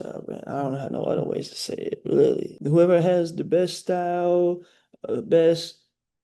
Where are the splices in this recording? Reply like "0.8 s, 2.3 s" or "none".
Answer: 2.5 s